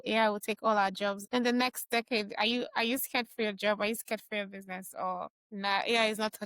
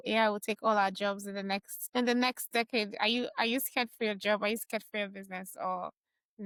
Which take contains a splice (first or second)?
first